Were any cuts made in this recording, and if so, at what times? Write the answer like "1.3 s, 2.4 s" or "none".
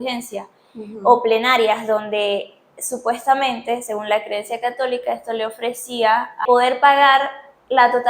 6.4 s